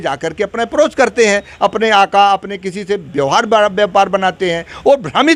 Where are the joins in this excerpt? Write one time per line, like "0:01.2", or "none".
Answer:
none